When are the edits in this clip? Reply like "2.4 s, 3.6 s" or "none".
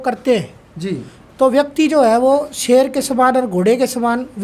none